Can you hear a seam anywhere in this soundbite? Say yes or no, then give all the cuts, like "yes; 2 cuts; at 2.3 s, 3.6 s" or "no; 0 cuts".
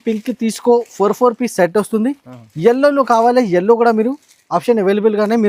no; 0 cuts